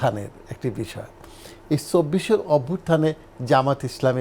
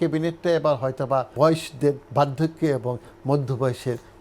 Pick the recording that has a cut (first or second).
second